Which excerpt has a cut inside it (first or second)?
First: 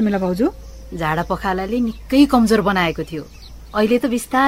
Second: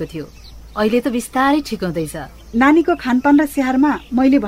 second